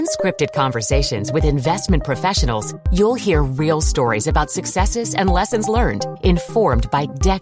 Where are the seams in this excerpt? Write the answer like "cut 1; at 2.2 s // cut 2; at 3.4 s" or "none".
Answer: none